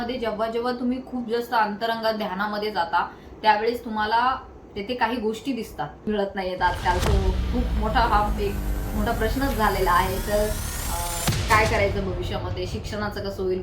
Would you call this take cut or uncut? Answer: cut